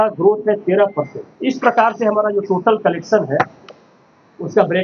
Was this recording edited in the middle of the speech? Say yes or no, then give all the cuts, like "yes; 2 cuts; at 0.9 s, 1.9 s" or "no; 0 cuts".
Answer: yes; 1 cut; at 1.2 s